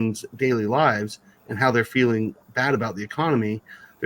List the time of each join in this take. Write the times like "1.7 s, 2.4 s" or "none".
none